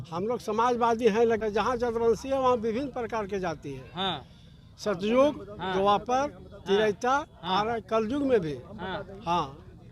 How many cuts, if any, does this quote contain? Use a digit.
1